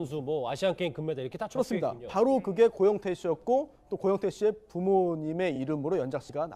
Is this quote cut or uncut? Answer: cut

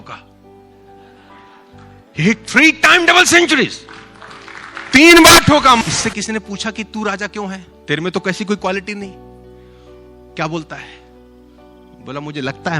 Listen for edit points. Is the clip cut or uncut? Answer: cut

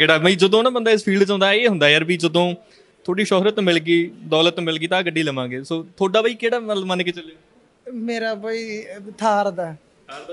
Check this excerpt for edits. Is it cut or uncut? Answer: uncut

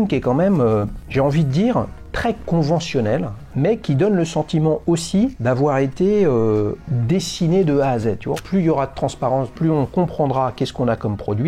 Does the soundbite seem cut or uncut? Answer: cut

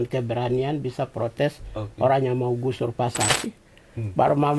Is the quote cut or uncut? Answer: cut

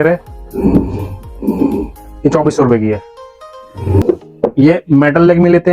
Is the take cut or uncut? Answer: cut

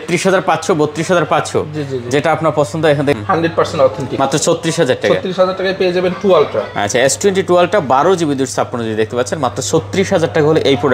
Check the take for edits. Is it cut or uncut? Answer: cut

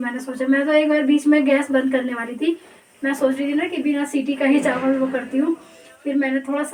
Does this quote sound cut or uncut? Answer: uncut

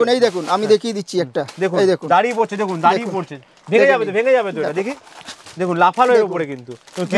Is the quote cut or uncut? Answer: uncut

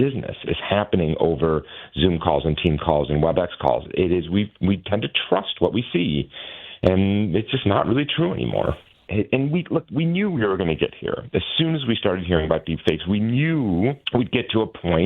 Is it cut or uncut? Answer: cut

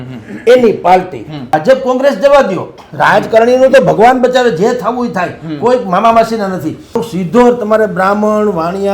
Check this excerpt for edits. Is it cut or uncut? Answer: cut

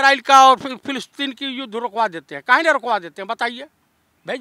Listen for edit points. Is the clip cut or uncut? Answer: uncut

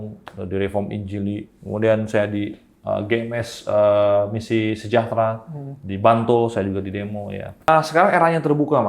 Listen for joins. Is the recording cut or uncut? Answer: cut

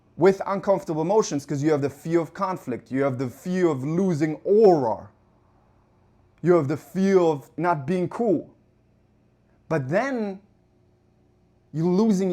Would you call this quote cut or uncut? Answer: cut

